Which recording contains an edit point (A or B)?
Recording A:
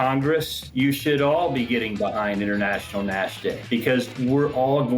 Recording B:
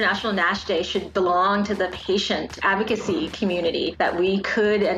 A